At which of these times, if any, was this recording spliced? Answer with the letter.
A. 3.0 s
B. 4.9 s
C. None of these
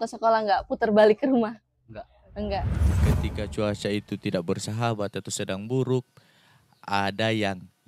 A